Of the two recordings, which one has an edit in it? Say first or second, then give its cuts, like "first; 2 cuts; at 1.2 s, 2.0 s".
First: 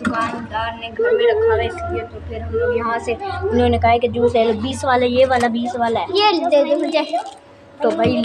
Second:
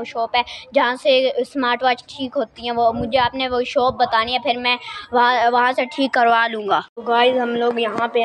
second; 1 cut; at 6.9 s